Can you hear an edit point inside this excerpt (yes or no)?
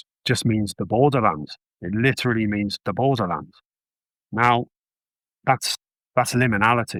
no